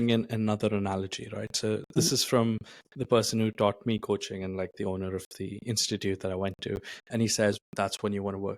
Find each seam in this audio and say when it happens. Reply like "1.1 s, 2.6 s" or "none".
2.0 s, 7.6 s

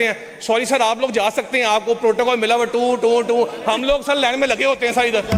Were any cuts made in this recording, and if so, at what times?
none

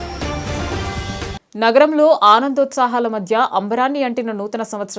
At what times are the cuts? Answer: none

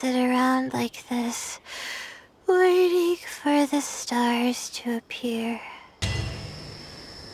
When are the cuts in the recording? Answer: 6.0 s

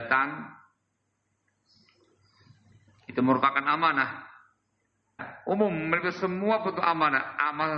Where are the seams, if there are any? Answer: 5.3 s

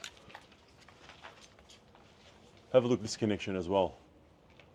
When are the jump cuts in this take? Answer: none

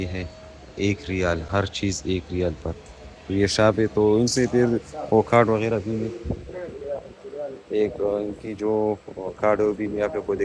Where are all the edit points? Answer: none

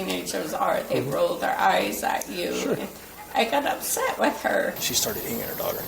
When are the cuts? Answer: 4.9 s

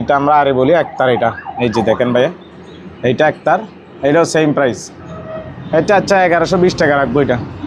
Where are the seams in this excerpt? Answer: none

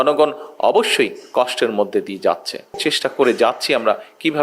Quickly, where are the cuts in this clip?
2.8 s

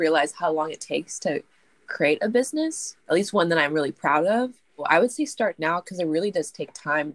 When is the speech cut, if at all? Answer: 2.9 s, 4.8 s

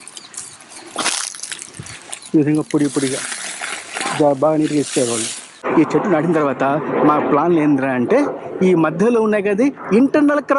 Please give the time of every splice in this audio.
5.6 s

